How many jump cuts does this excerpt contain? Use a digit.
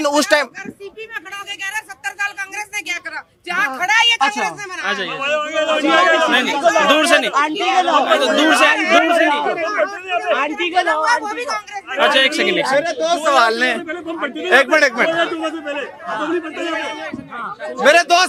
0